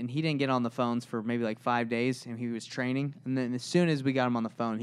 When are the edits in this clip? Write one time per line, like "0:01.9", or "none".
none